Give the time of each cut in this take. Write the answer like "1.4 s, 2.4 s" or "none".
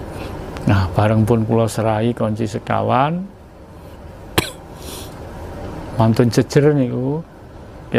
none